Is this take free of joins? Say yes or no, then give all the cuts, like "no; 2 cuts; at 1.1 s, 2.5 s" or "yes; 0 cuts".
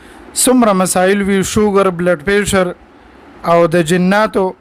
yes; 0 cuts